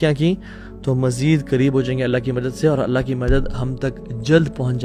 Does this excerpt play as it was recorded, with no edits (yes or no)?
yes